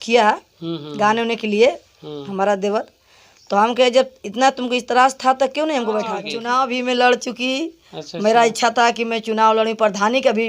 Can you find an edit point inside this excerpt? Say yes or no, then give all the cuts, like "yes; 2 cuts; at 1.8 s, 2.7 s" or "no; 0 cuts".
yes; 1 cut; at 6.3 s